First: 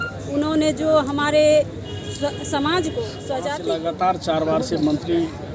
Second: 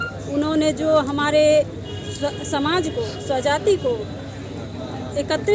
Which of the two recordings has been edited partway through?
first; 1 cut; at 3.6 s

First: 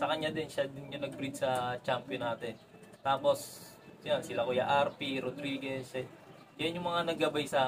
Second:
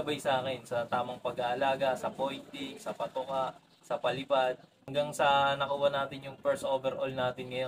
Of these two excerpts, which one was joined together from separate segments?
second; 1 cut; at 4.8 s

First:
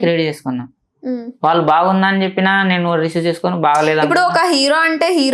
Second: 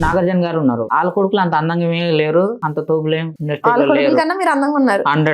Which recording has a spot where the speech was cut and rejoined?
second; 3 cuts; at 0.9 s, 2.6 s, 3.3 s

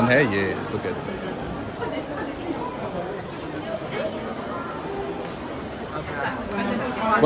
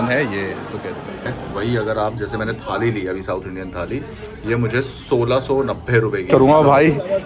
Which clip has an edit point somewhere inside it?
second; 2 cuts; at 1.4 s, 6.3 s

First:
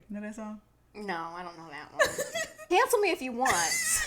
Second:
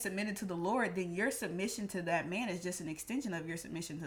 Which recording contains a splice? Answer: first; 1 cut; at 2.6 s

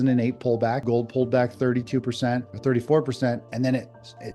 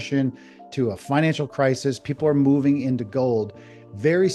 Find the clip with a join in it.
first; 2 cuts; at 0.8 s, 2.5 s

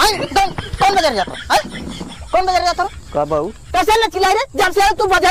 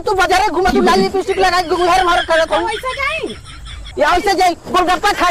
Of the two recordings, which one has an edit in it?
first; 1 cut; at 3.6 s

